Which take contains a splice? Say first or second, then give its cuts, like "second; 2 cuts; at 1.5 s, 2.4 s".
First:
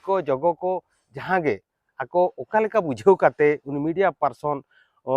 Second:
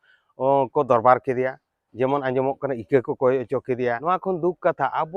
second; 1 cut; at 4.0 s